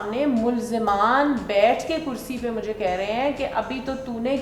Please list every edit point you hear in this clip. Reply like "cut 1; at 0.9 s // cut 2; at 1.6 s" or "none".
none